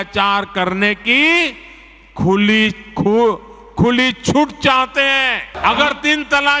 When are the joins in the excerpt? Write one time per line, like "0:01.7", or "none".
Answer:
0:05.5